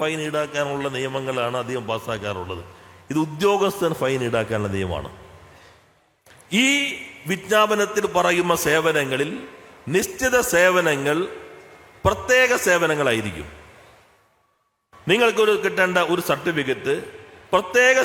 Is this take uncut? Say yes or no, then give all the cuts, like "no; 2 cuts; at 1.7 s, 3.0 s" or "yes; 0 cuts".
yes; 0 cuts